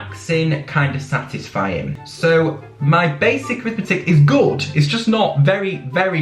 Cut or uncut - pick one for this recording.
cut